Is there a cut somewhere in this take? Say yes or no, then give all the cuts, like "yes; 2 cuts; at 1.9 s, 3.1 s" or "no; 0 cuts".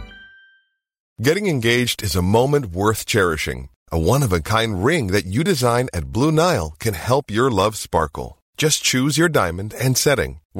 yes; 1 cut; at 1.1 s